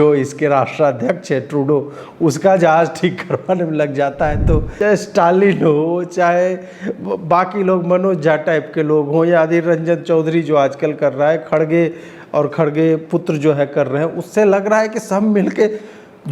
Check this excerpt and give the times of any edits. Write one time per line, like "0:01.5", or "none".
0:04.7